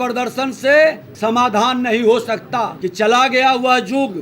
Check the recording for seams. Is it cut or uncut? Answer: cut